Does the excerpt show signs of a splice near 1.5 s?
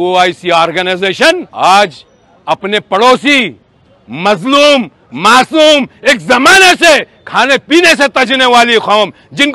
yes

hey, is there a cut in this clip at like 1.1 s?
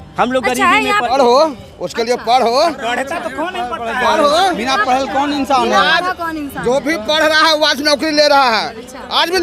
yes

